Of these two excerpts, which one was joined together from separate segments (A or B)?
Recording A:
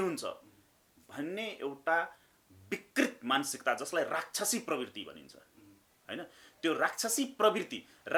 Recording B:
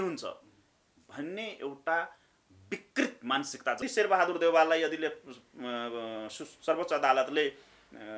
B